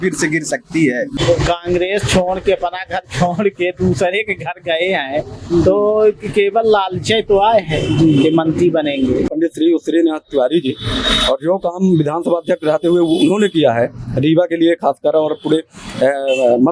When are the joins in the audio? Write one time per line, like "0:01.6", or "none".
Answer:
0:01.2
0:09.3